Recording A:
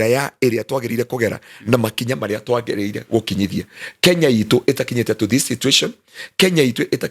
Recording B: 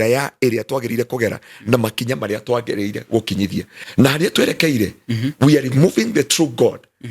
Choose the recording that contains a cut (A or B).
B